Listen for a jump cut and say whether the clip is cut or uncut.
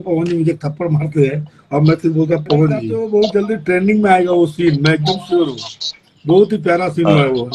cut